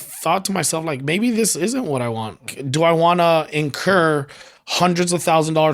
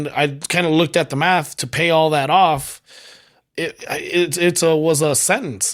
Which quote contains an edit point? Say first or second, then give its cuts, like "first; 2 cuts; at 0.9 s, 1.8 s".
first; 1 cut; at 2.4 s